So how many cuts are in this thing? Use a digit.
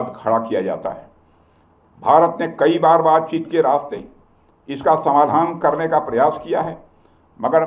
0